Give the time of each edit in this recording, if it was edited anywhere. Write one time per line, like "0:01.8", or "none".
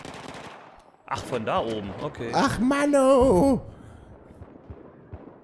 0:02.3
0:03.6